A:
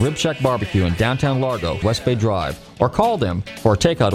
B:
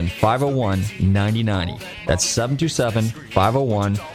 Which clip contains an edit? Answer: A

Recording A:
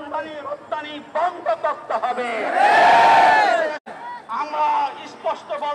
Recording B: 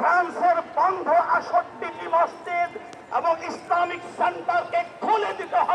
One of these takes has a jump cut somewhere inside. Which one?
A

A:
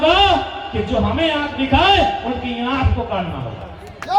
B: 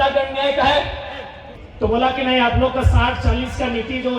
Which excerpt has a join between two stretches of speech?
B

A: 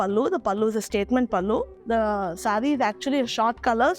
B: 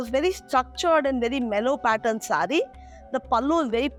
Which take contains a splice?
A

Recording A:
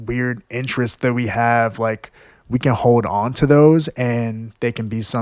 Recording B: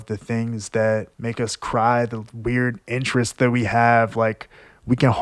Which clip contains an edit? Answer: B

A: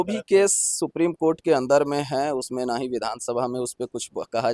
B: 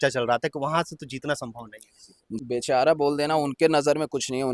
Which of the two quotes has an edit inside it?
B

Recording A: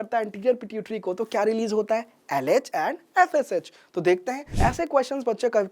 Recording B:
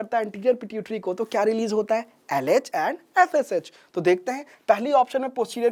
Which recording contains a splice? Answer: A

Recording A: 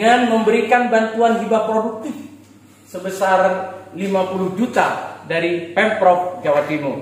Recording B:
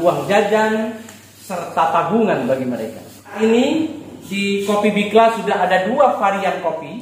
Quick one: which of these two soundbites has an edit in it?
B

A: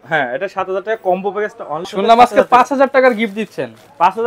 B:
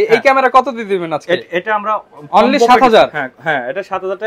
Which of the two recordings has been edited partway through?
A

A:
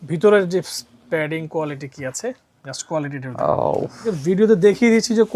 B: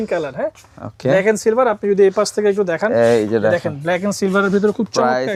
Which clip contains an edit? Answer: A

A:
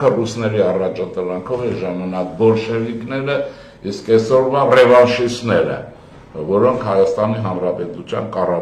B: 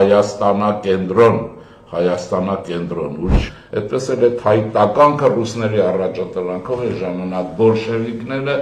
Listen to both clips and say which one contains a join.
B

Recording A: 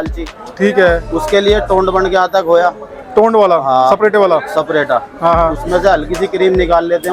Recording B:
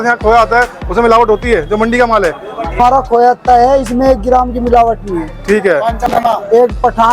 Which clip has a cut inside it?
B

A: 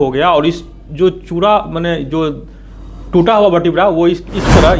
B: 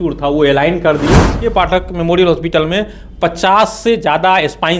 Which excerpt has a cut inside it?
B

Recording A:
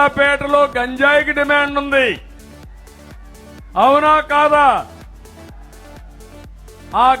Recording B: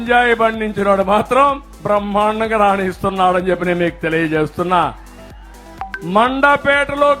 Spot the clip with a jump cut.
A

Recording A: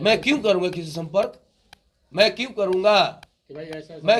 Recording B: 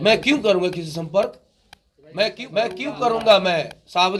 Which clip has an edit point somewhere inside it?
B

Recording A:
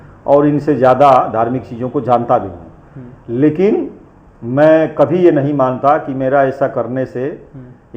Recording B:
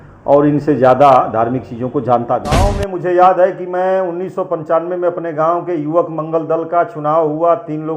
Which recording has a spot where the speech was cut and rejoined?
B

